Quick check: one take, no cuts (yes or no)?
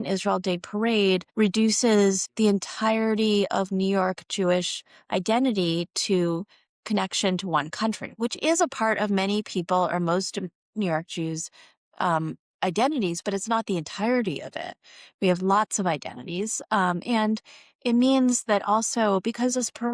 no